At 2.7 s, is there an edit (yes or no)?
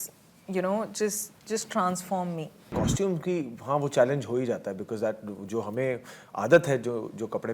yes